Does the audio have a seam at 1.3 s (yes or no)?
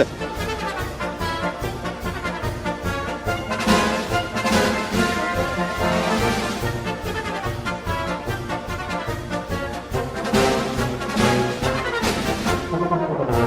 yes